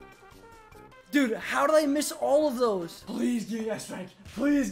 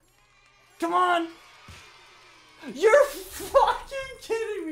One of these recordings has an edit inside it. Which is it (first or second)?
first